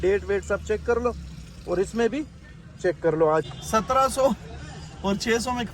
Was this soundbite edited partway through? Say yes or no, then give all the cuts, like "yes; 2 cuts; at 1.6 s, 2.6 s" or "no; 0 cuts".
yes; 1 cut; at 3.5 s